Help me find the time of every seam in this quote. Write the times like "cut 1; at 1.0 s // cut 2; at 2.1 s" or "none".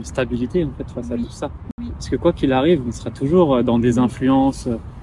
none